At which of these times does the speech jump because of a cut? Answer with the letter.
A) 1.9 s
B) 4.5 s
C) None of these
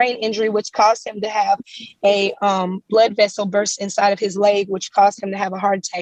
C